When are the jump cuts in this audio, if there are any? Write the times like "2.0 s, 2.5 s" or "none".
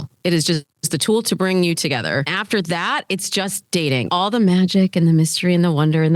2.4 s, 4.1 s